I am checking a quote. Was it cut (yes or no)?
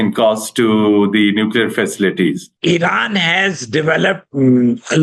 yes